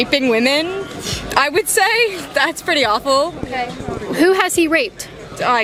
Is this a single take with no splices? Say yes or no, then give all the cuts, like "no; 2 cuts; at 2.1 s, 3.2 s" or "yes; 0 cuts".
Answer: yes; 0 cuts